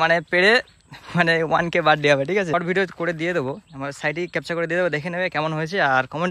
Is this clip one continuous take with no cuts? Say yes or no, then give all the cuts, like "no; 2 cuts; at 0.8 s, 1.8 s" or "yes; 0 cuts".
no; 1 cut; at 2.5 s